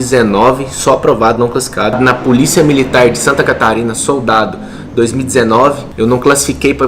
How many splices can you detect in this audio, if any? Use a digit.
1